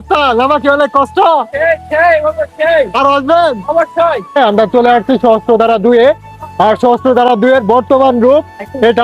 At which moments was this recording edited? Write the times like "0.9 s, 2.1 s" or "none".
4.4 s